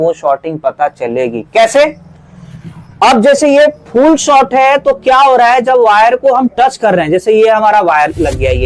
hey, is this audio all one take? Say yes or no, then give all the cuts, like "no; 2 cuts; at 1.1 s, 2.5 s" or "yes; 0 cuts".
yes; 0 cuts